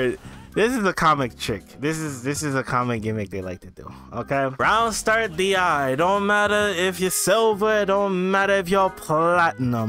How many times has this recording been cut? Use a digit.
1